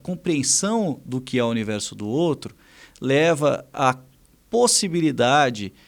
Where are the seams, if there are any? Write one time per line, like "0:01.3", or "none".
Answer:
none